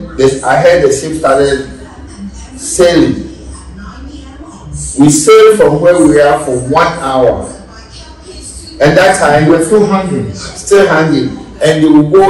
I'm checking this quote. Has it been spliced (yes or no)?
no